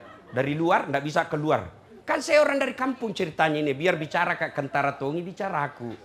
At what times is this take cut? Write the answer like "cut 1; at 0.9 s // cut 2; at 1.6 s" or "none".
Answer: none

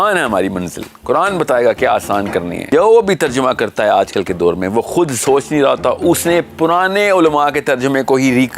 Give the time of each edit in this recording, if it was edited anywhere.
cut 1; at 2.6 s

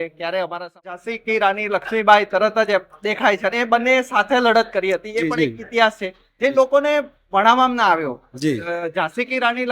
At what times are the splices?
cut 1; at 1.1 s

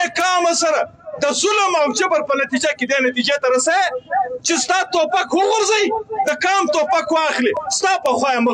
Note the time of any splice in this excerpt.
none

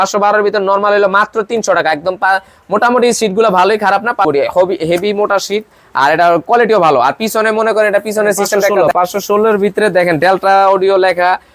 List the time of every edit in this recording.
cut 1; at 4.2 s // cut 2; at 8.8 s

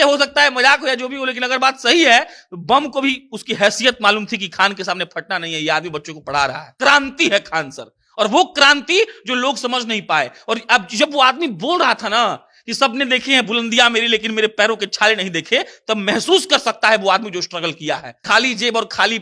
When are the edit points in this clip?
cut 1; at 6.6 s // cut 2; at 18.2 s

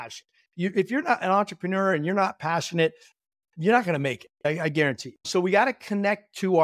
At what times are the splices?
cut 1; at 4.4 s // cut 2; at 5.1 s

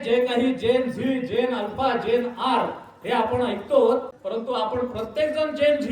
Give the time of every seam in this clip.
cut 1; at 4.2 s

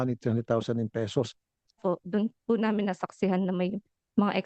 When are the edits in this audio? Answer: cut 1; at 1.8 s

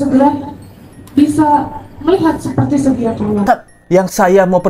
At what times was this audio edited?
cut 1; at 3.4 s

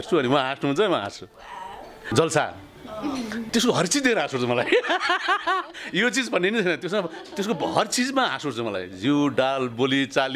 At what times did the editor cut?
cut 1; at 1.9 s // cut 2; at 3.5 s

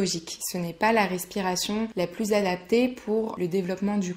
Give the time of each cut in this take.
cut 1; at 1.9 s // cut 2; at 3.3 s

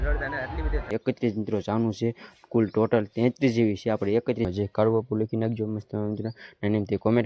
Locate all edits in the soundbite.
cut 1; at 0.9 s // cut 2; at 4.5 s

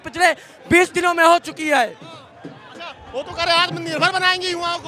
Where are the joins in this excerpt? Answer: none

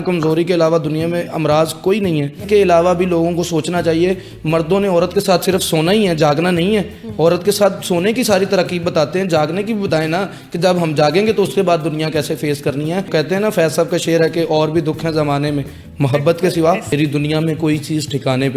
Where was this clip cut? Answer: cut 1; at 2.4 s // cut 2; at 13.1 s // cut 3; at 16.9 s

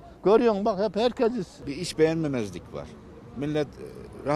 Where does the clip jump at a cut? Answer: cut 1; at 1.8 s

